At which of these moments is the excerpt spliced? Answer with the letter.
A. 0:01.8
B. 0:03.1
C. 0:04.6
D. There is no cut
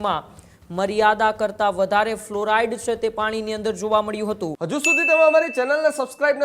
C